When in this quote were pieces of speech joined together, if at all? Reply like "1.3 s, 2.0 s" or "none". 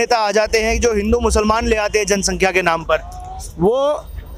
none